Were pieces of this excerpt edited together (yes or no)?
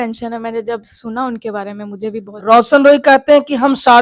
no